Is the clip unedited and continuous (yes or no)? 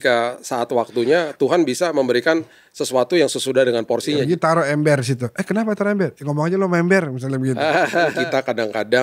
no